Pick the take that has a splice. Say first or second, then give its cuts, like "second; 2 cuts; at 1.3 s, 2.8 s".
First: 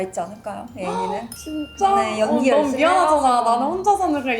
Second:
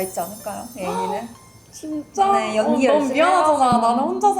first; 1 cut; at 1.4 s